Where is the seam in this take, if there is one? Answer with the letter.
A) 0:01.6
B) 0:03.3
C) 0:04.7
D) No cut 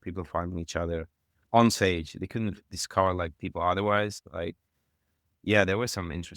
D